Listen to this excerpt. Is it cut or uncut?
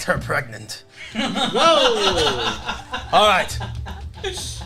uncut